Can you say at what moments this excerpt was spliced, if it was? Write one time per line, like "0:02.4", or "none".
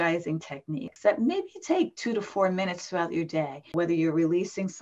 0:00.9
0:03.7